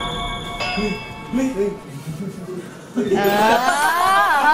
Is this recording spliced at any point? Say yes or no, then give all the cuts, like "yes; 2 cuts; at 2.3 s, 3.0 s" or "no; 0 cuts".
no; 0 cuts